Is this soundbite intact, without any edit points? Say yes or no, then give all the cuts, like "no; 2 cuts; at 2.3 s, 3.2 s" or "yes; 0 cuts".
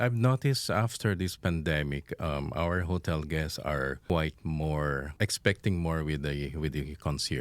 no; 2 cuts; at 4.0 s, 5.1 s